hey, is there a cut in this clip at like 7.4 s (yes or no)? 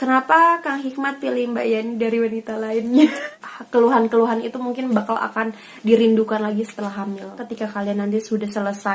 yes